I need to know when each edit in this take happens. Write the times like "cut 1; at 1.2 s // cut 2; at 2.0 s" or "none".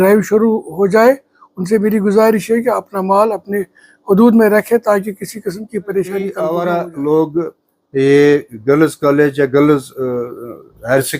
cut 1; at 6.4 s